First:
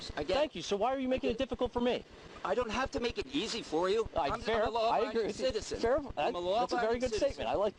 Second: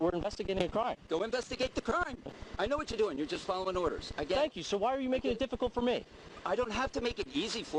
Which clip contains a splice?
second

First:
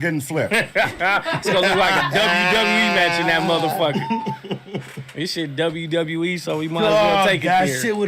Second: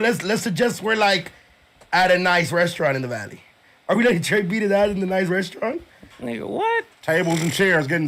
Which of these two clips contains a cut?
first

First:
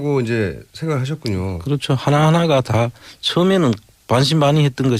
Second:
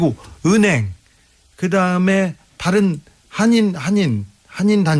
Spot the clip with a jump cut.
second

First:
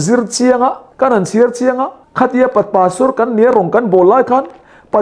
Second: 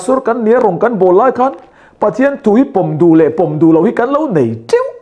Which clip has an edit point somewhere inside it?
first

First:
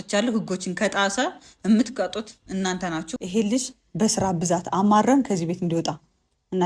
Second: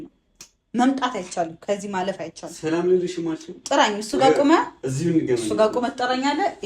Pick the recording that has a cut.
first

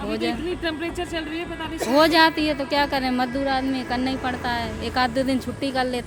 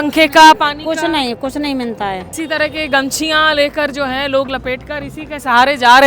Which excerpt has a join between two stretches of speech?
second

